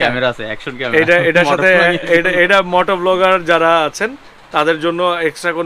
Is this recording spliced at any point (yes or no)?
no